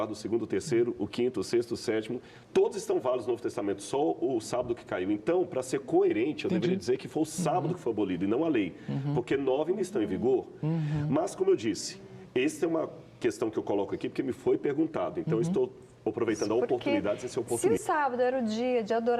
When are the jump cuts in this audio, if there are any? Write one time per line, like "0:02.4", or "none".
0:17.6